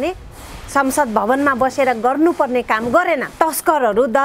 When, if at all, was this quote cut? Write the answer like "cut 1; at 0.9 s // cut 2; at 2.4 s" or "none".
cut 1; at 3.3 s